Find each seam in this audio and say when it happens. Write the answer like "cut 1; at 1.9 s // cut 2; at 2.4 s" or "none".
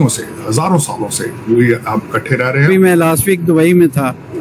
cut 1; at 2.7 s